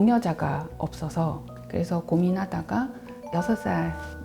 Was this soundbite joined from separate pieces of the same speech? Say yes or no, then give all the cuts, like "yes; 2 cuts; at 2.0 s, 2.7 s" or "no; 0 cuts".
yes; 1 cut; at 1.5 s